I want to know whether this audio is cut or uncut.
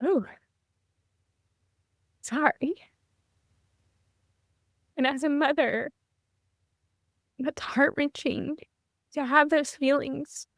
uncut